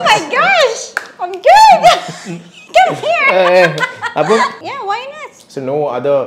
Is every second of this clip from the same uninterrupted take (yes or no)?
no